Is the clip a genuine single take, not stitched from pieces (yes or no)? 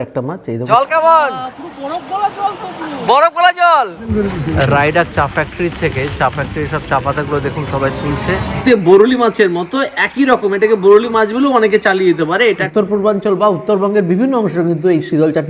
no